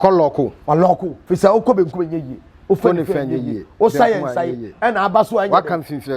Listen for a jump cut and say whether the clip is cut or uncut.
cut